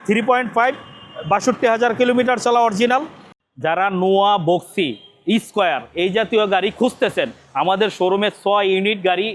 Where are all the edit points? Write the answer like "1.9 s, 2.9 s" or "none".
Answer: 3.4 s